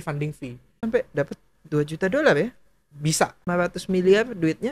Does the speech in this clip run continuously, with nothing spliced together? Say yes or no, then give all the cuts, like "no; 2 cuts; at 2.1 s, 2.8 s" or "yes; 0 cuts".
no; 2 cuts; at 0.8 s, 3.5 s